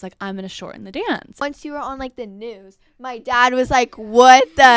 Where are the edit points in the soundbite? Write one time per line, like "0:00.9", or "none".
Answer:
0:01.4